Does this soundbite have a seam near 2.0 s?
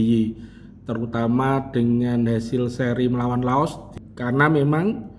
no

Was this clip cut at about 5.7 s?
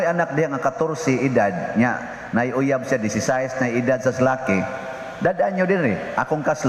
no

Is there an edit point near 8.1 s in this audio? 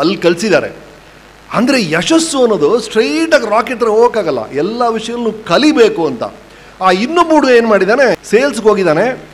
yes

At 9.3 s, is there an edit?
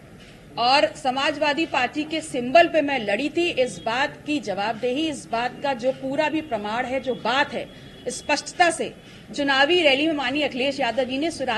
no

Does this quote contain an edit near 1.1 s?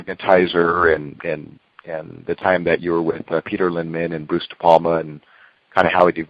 yes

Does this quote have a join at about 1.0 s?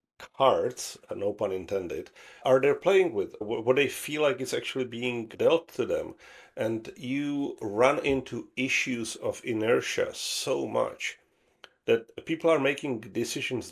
no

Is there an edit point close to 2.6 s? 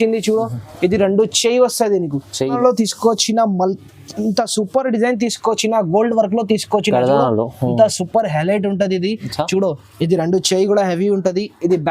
yes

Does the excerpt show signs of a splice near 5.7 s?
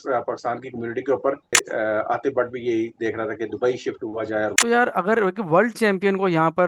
no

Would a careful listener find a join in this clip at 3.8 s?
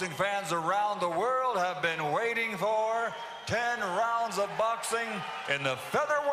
no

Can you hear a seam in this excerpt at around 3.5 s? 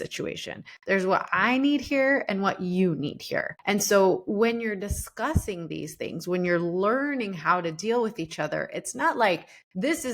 yes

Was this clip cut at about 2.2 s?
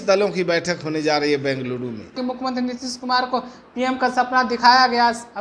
yes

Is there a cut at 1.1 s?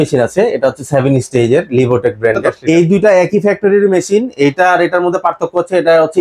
no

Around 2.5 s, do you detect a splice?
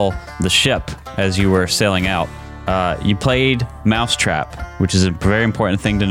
yes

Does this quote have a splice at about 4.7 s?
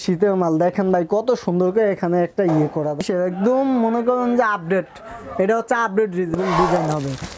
no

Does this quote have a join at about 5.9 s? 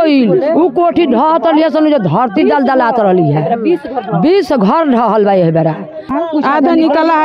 yes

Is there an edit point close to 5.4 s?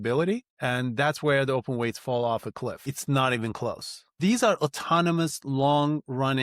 no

